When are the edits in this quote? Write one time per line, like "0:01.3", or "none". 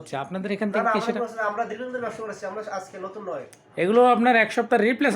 0:03.6